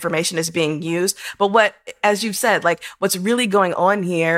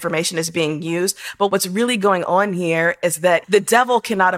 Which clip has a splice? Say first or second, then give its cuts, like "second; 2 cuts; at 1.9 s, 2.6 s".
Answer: second; 2 cuts; at 1.5 s, 3.4 s